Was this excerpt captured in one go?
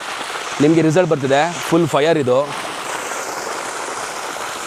yes; 0 cuts

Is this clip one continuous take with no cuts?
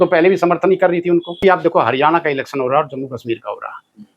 no; 1 cut; at 1.4 s

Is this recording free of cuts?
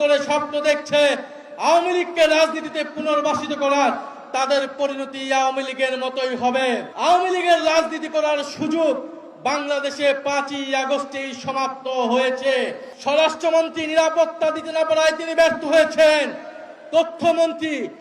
no; 2 cuts; at 6.9 s, 12.9 s

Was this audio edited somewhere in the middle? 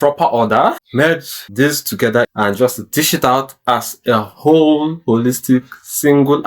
yes; 2 cuts; at 0.9 s, 2.3 s

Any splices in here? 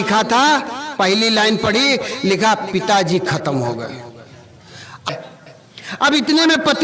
yes; 1 cut; at 5.0 s

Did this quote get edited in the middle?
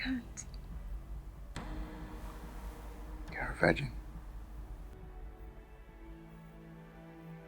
yes; 1 cut; at 4.9 s

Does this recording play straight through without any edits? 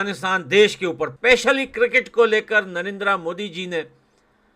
no; 1 cut; at 1.1 s

